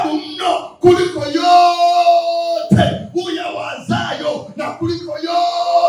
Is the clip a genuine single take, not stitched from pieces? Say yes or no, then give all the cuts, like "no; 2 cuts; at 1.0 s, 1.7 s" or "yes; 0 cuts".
yes; 0 cuts